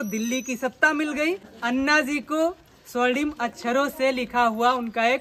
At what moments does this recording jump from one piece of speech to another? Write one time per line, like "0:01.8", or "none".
0:01.5